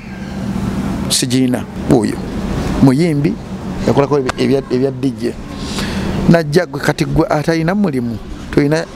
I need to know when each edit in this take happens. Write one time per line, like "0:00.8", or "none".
0:01.7